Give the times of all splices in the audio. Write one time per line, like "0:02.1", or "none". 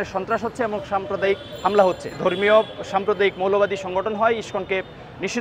0:02.1